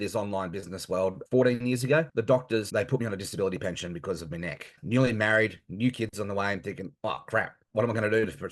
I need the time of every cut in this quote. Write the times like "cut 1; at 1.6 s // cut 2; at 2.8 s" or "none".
cut 1; at 1.2 s // cut 2; at 2.3 s // cut 3; at 4.8 s

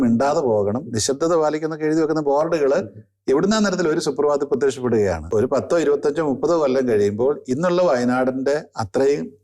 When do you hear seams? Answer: cut 1; at 5.2 s

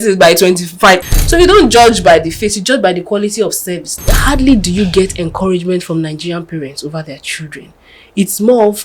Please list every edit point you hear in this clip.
cut 1; at 1.0 s // cut 2; at 3.9 s

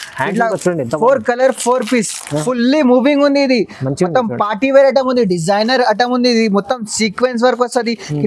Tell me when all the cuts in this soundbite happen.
cut 1; at 2.3 s

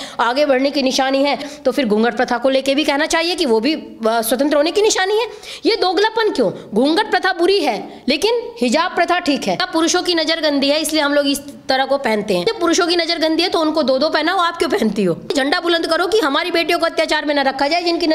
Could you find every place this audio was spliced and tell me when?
cut 1; at 1.5 s // cut 2; at 9.6 s // cut 3; at 12.4 s // cut 4; at 15.3 s

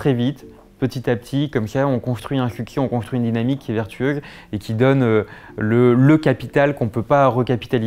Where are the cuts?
none

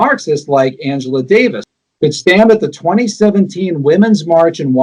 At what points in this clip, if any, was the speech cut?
cut 1; at 1.7 s

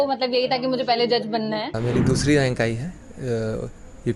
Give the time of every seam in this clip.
cut 1; at 1.8 s

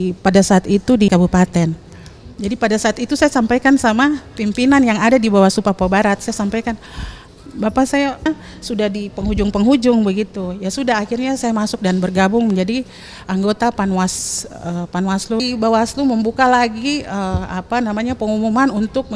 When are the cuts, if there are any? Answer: cut 1; at 1.1 s // cut 2; at 8.3 s // cut 3; at 15.4 s

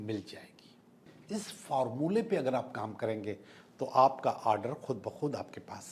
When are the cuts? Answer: cut 1; at 1.1 s

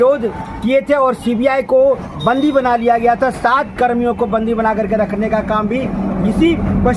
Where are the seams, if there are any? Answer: none

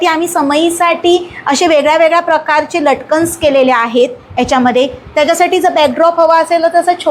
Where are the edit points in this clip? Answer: none

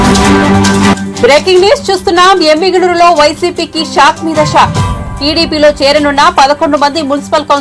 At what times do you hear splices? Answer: cut 1; at 0.9 s

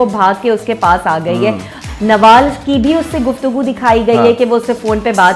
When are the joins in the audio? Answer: cut 1; at 1.8 s

